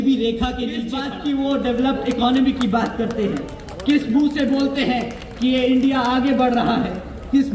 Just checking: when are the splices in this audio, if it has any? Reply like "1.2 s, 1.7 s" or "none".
1.0 s